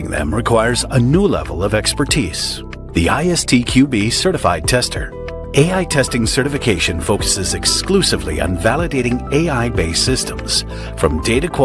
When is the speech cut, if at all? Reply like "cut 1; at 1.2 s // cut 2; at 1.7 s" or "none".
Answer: cut 1; at 5.4 s